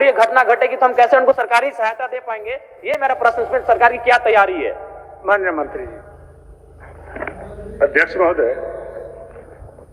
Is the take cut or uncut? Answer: uncut